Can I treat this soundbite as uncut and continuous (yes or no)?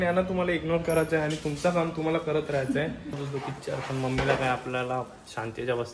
no